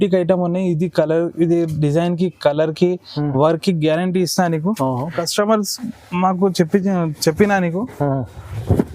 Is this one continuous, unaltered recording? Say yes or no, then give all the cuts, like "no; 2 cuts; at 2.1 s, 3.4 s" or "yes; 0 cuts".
no; 1 cut; at 5.2 s